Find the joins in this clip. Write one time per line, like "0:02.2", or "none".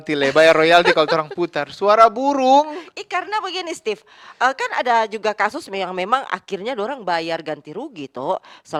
none